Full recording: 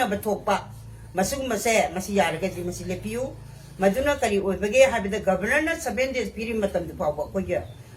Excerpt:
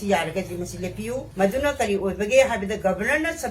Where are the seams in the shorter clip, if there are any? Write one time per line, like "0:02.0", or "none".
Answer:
0:01.3